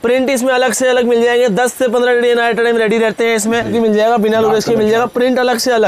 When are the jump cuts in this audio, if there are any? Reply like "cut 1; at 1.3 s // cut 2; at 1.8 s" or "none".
cut 1; at 3.7 s